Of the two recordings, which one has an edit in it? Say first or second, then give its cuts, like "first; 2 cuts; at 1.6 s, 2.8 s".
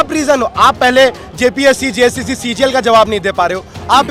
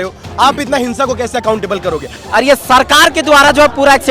second; 1 cut; at 2.2 s